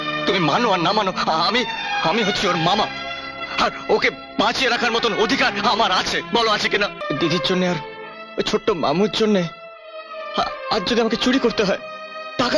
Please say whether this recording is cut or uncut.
cut